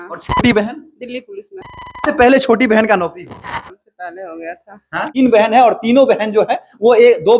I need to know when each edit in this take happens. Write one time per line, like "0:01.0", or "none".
0:05.1